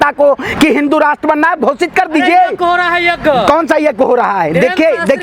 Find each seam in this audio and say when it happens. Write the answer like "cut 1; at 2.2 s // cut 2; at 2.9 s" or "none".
none